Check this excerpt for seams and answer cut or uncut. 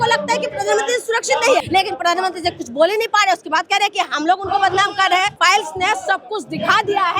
cut